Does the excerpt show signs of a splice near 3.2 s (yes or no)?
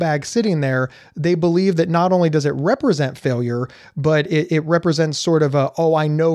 no